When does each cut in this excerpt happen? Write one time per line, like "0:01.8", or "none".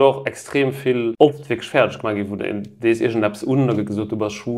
0:01.1